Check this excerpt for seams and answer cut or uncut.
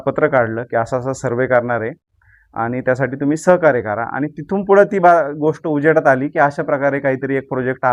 uncut